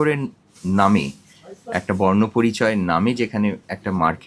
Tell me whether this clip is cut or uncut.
uncut